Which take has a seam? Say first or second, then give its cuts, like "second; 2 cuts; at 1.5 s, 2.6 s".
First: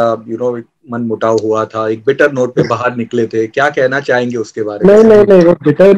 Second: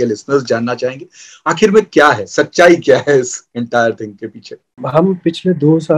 second; 1 cut; at 4.8 s